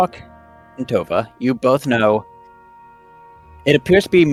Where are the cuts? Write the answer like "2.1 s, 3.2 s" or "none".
none